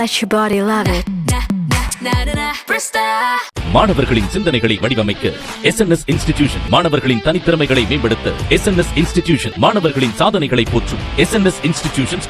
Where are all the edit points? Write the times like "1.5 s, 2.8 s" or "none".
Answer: none